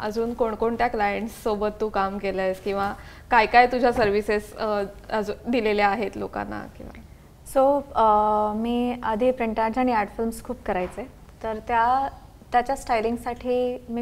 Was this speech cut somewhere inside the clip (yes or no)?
no